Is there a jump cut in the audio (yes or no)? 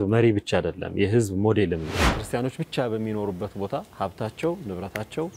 yes